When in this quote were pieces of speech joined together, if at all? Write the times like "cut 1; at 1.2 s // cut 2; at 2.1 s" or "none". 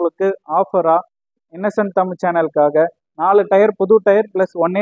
none